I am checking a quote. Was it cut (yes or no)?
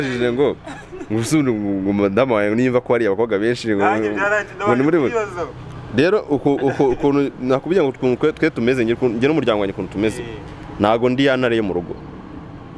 no